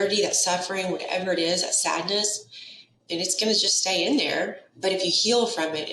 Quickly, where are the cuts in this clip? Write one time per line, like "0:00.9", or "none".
0:04.6